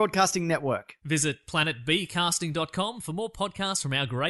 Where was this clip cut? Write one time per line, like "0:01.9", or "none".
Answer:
none